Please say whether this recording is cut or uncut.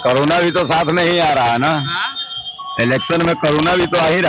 uncut